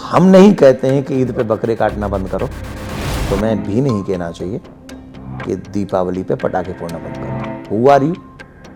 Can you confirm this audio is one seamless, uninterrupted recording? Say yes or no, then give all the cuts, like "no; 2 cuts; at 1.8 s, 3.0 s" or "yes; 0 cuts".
yes; 0 cuts